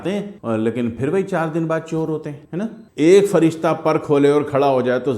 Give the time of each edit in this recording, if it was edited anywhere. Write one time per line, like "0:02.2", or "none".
0:02.8